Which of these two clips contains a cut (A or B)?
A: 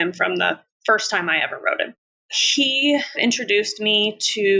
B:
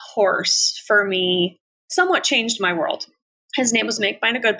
A